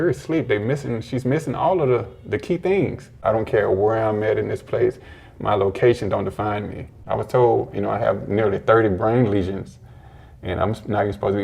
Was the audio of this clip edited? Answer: yes; 2 cuts; at 3.1 s, 6.9 s

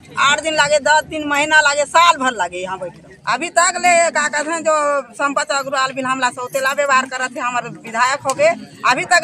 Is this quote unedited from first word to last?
no; 1 cut; at 3.1 s

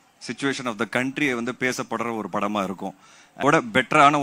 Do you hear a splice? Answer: yes; 1 cut; at 3.3 s

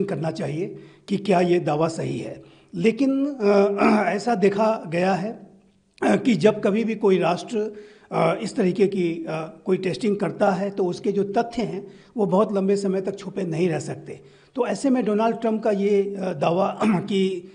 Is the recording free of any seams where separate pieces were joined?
yes; 0 cuts

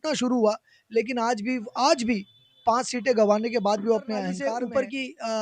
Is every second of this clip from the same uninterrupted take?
no; 1 cut; at 4.4 s

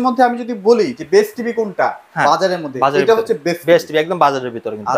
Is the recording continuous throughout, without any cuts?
yes; 0 cuts

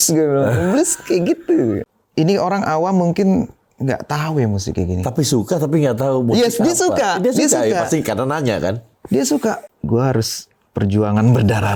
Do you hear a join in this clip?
yes; 2 cuts; at 1.9 s, 9.6 s

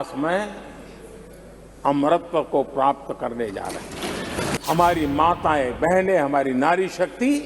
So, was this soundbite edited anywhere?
yes; 1 cut; at 4.6 s

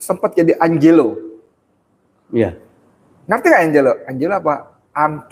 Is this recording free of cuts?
yes; 0 cuts

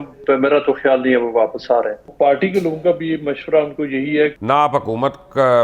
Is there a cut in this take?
yes; 2 cuts; at 2.1 s, 4.3 s

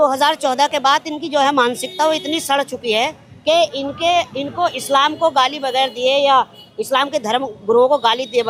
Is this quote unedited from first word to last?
yes; 0 cuts

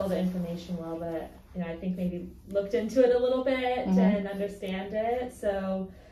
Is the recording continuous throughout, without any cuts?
yes; 0 cuts

